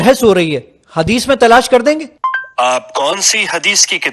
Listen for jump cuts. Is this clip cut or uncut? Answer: cut